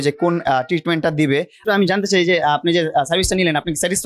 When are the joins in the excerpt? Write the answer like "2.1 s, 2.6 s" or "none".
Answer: 1.6 s